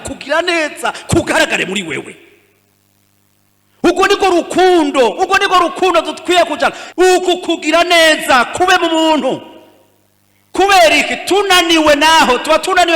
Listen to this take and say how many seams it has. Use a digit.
1